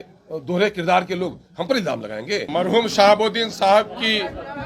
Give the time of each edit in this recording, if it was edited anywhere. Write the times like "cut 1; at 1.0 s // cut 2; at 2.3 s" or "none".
cut 1; at 2.4 s